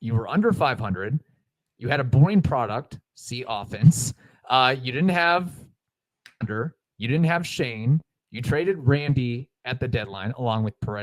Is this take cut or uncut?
uncut